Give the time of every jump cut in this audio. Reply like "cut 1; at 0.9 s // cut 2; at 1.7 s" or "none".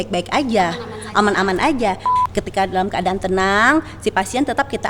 cut 1; at 2.1 s